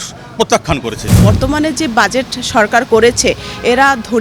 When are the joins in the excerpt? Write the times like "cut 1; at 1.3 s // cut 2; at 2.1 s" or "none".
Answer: cut 1; at 1.1 s